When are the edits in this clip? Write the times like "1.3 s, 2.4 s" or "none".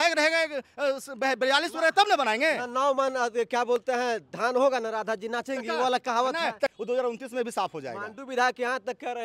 6.7 s